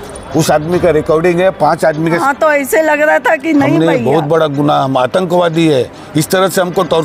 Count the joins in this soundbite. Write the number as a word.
one